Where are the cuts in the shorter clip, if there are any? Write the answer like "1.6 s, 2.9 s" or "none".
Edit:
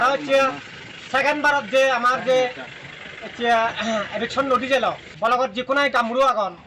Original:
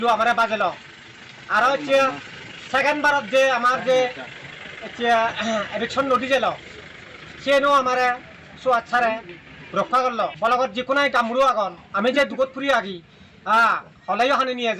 5.1 s